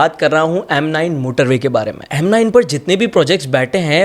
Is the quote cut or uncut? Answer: cut